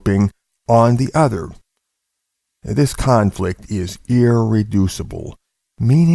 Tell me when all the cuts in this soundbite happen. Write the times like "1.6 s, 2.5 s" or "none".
1.0 s